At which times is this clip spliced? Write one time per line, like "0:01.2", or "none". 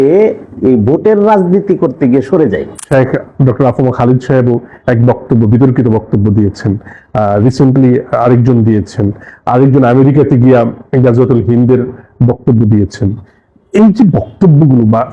0:02.7